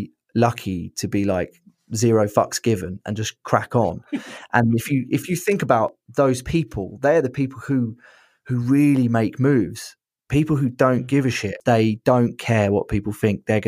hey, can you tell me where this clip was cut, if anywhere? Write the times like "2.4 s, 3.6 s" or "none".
11.6 s